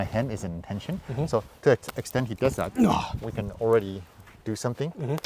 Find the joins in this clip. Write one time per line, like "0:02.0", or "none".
none